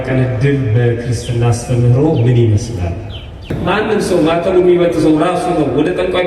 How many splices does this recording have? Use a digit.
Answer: 1